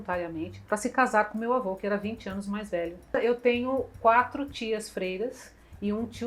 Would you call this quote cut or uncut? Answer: cut